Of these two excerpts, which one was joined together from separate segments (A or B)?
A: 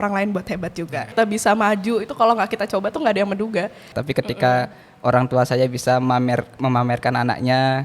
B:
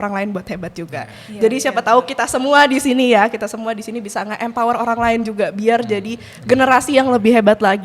A